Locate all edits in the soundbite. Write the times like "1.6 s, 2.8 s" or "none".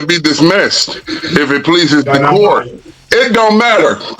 2.7 s